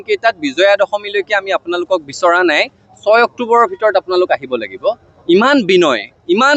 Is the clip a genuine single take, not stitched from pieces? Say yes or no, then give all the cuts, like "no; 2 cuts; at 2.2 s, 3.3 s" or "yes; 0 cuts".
yes; 0 cuts